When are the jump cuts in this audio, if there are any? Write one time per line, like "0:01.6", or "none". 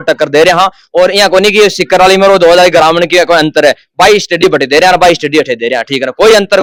none